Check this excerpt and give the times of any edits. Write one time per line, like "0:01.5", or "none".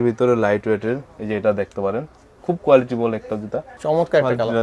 0:03.7